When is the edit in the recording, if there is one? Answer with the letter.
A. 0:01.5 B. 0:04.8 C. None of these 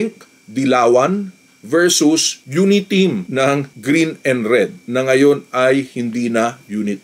C